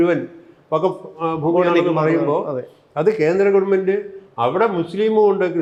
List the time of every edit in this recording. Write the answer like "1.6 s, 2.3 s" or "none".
none